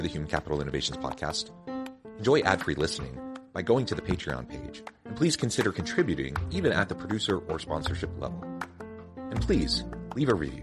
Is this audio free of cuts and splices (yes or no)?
yes